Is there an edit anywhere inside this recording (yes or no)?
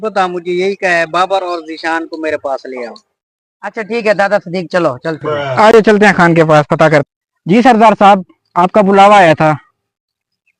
no